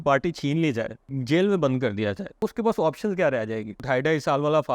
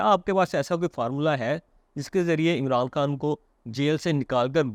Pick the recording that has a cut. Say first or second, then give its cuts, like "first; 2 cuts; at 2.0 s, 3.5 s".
first; 3 cuts; at 1.2 s, 2.4 s, 3.8 s